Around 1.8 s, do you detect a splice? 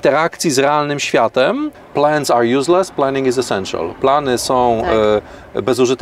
yes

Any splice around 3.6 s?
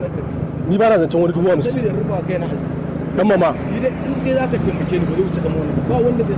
yes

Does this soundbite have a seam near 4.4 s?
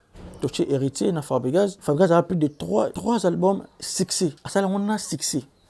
yes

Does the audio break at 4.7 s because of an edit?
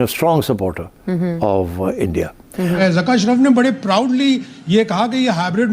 no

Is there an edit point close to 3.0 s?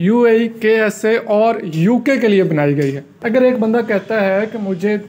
yes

